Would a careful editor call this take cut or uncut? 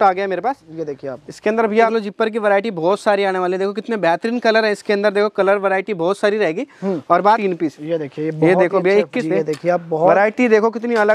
cut